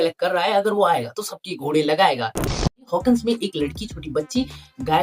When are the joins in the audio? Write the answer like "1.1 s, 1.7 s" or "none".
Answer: 2.6 s